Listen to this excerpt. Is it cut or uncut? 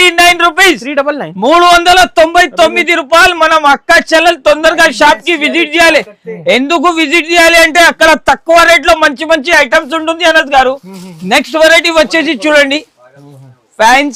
uncut